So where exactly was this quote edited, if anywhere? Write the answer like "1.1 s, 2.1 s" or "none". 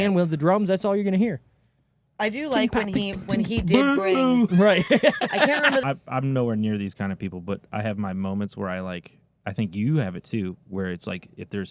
5.8 s